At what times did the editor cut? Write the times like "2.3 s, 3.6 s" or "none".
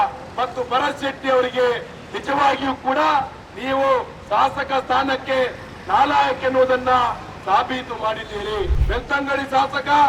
8.8 s